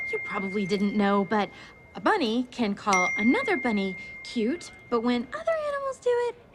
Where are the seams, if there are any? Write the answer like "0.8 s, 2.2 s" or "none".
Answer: none